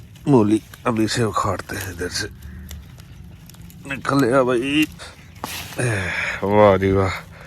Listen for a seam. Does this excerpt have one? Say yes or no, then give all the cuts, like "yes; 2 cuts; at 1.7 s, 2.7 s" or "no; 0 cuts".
yes; 1 cut; at 5.0 s